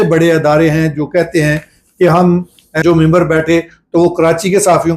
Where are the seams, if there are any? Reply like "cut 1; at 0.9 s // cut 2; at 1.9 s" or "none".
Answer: cut 1; at 2.6 s